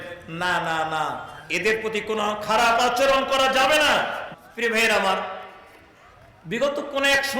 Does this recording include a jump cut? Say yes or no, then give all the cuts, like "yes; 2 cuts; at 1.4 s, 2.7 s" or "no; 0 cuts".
yes; 1 cut; at 4.2 s